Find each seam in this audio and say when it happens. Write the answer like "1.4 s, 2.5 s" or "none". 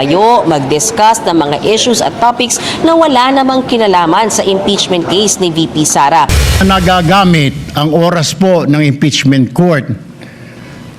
6.4 s